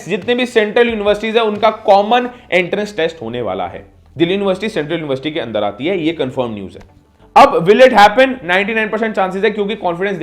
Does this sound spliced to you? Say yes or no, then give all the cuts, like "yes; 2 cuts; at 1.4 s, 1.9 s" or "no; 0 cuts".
no; 0 cuts